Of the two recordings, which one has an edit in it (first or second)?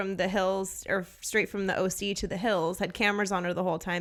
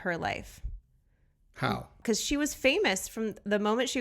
second